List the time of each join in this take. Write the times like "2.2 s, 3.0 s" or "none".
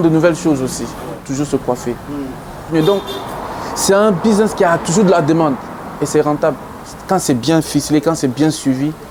1.2 s, 2.7 s